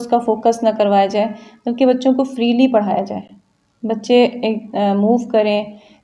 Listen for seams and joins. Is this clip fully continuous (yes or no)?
yes